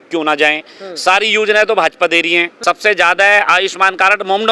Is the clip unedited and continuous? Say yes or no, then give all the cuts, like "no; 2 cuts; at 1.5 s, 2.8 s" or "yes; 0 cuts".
no; 1 cut; at 2.5 s